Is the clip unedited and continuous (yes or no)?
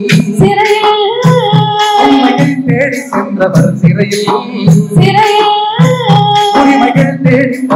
yes